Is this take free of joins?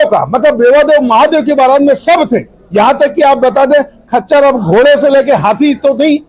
yes; 0 cuts

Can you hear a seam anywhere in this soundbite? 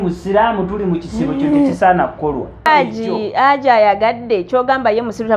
yes; 1 cut; at 2.7 s

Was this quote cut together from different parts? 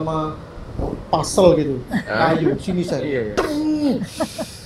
no; 0 cuts

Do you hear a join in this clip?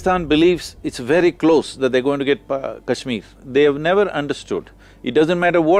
no; 0 cuts

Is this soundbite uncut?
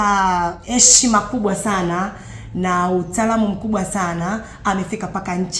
yes; 0 cuts

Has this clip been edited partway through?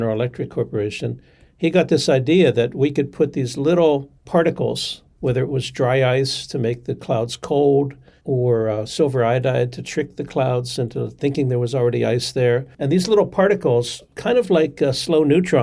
no; 0 cuts

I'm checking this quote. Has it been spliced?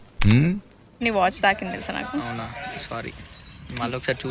yes; 1 cut; at 1.0 s

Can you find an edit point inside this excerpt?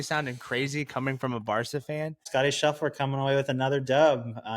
yes; 1 cut; at 2.2 s

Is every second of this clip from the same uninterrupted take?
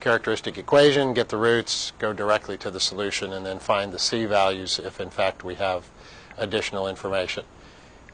yes; 0 cuts

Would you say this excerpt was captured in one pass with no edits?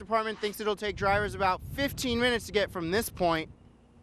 yes; 0 cuts

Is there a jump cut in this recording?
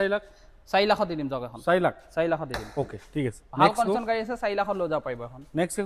no; 0 cuts

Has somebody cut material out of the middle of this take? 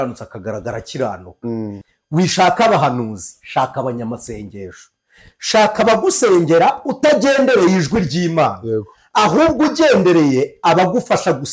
yes; 1 cut; at 1.8 s

